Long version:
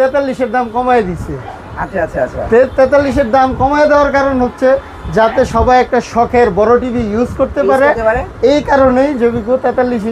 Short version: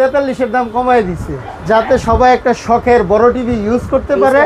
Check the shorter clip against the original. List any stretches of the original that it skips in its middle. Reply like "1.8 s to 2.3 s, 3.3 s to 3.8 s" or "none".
1.5 s to 5.0 s